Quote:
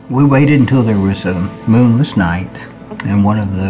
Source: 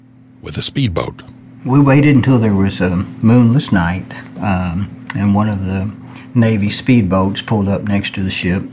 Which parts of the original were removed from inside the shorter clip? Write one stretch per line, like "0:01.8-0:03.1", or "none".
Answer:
0:04.3-0:04.9